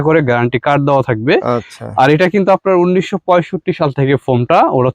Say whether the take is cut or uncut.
uncut